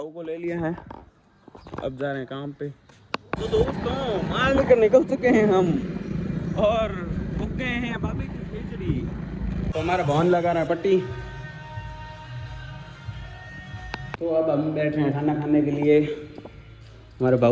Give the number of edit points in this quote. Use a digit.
3